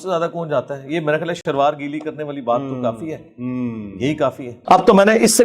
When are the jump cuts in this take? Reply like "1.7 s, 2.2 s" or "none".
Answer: 1.4 s, 4.5 s